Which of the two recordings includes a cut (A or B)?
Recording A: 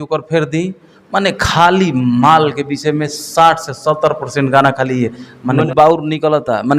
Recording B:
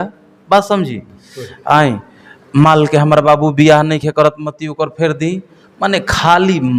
A